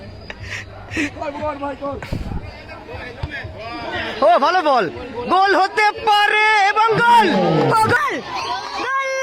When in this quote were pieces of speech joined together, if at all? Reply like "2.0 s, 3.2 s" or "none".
8.0 s

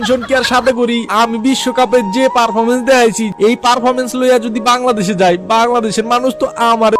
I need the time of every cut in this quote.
3.3 s

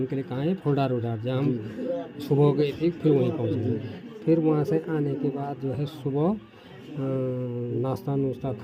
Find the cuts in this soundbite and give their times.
5.4 s

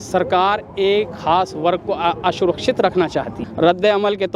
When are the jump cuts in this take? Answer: 3.4 s

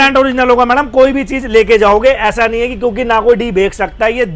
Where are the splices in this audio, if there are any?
none

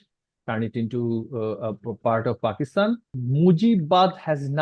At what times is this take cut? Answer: 3.1 s

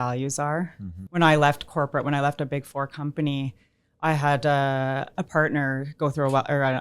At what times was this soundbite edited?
0.9 s, 5.1 s

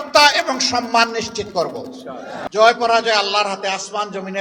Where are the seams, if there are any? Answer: none

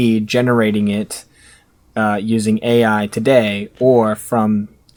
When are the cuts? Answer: none

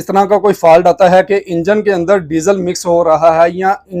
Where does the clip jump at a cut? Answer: none

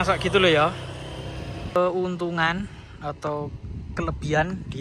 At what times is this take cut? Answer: 1.8 s

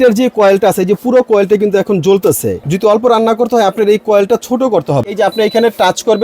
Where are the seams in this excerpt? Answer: 2.6 s, 5.1 s

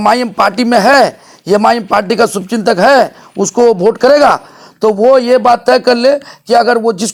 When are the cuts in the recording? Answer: none

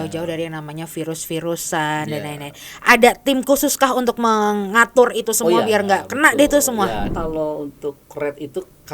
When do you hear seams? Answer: 7.1 s

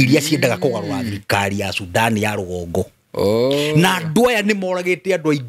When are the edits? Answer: none

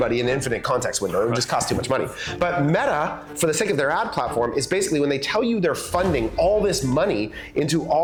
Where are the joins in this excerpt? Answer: none

